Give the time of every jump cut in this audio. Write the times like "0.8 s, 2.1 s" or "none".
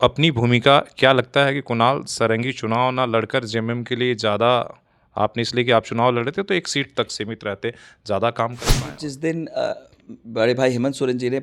8.9 s

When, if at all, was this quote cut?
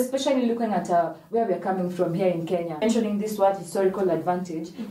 2.8 s

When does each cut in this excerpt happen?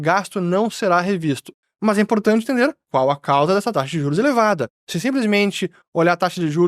1.5 s

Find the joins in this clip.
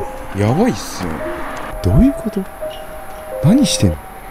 1.7 s

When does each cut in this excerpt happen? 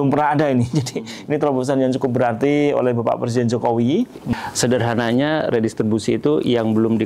4.2 s

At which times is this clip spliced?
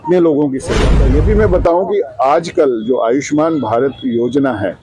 0.9 s

